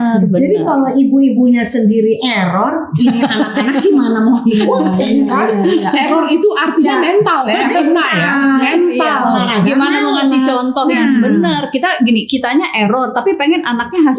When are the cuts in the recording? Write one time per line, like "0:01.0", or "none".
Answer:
none